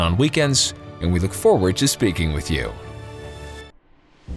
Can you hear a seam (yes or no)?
yes